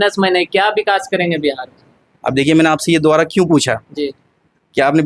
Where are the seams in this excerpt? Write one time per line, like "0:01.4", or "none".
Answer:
none